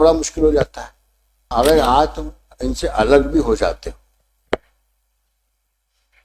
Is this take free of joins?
no; 1 cut; at 1.4 s

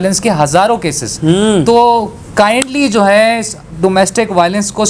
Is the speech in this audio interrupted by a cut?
no; 0 cuts

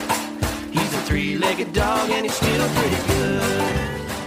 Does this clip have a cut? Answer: no; 0 cuts

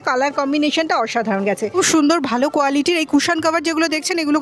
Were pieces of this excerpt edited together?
yes; 1 cut; at 1.7 s

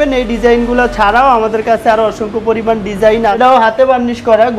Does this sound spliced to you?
yes; 1 cut; at 3.4 s

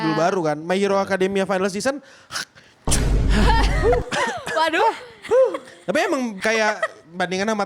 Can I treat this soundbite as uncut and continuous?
no; 1 cut; at 6.4 s

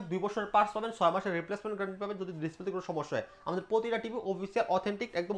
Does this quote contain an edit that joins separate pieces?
no; 0 cuts

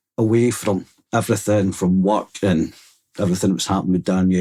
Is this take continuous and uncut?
yes; 0 cuts

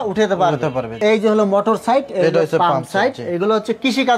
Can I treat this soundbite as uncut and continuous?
no; 1 cut; at 1.0 s

